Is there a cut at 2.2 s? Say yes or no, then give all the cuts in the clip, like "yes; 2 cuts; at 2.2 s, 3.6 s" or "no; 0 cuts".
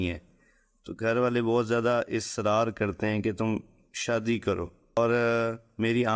no; 1 cut; at 5.0 s